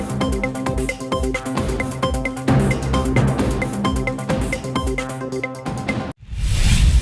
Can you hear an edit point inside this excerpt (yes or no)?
yes